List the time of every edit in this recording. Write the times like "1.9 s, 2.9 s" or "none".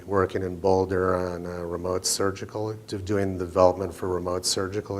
2.1 s